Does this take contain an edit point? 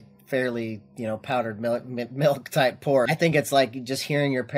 yes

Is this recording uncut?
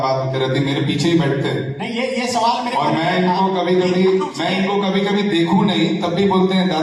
yes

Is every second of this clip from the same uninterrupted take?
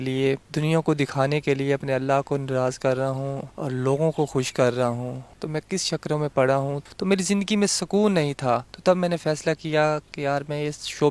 no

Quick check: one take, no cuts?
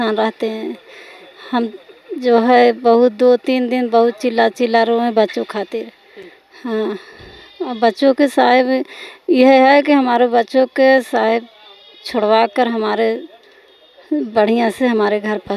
yes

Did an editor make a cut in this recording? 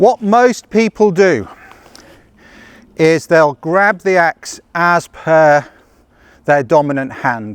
no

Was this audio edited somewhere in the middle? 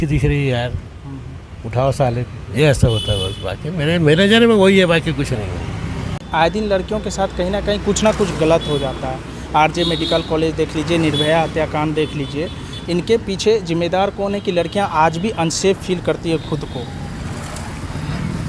no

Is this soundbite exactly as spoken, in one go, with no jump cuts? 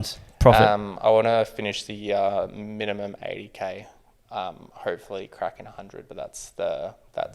yes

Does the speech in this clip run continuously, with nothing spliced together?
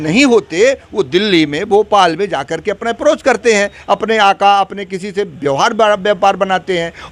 yes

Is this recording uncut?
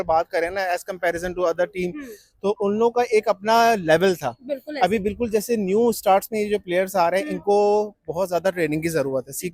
yes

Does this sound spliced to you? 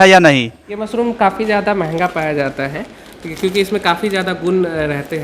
yes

